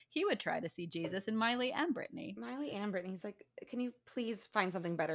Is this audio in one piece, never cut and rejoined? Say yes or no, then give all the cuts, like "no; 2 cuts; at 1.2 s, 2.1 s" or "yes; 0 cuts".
yes; 0 cuts